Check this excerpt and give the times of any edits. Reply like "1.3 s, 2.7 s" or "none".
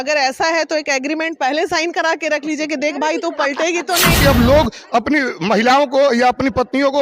4.2 s